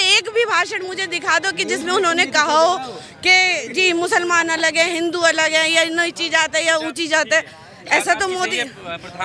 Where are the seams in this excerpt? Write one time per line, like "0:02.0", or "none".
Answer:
none

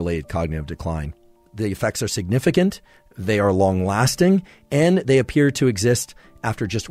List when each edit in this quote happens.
0:01.5

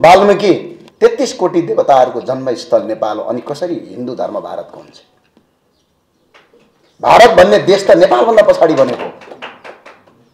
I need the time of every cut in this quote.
none

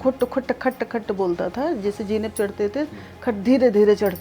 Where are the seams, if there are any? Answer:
none

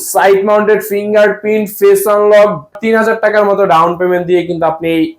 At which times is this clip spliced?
0:02.8

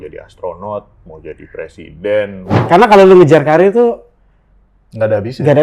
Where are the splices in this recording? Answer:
0:02.5

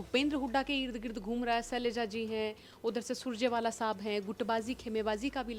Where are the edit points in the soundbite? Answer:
none

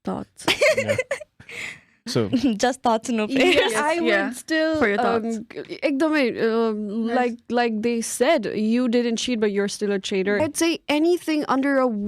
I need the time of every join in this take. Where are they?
0:10.4

